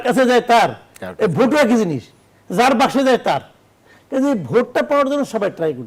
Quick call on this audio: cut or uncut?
uncut